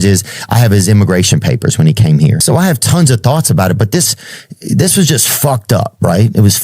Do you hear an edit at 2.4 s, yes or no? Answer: yes